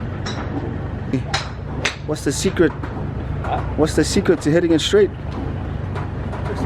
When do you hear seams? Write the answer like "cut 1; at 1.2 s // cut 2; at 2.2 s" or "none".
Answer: cut 1; at 1.1 s